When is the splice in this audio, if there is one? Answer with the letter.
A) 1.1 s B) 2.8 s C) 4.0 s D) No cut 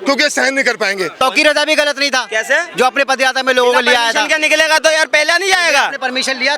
A